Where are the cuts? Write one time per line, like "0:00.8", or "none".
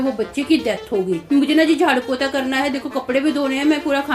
0:01.2

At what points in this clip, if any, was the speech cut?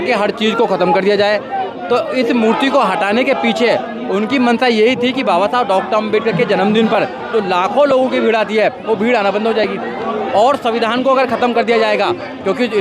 none

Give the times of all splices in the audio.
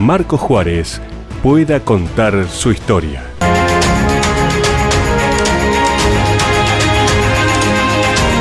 0:03.4

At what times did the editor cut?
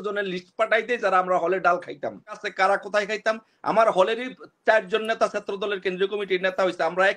0:02.5

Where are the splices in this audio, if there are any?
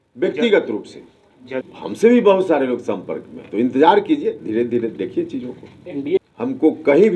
0:01.7
0:06.2

